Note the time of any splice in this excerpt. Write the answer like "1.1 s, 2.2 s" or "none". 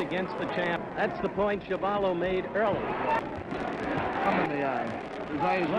none